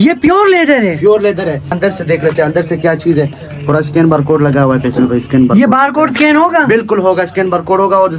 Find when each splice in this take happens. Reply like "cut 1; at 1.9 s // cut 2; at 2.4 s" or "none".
cut 1; at 1.7 s